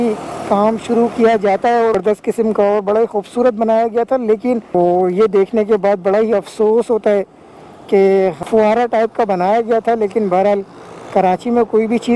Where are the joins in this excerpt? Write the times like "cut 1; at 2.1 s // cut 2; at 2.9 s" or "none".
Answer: cut 1; at 1.9 s // cut 2; at 4.7 s // cut 3; at 8.4 s